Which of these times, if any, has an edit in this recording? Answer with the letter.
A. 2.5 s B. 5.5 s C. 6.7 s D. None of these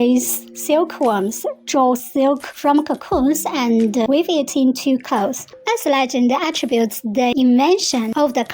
B